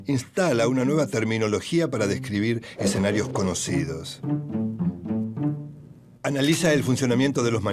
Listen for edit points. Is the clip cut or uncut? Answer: uncut